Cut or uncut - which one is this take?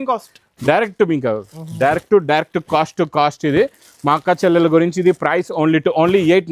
uncut